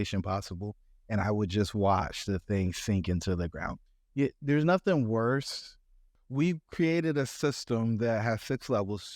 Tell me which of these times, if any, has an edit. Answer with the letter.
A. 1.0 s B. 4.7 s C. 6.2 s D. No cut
C